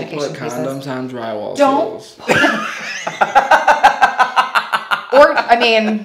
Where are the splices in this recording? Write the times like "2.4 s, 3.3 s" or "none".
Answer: none